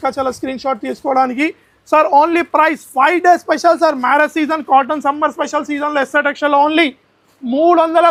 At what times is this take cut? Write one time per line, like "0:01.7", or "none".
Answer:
none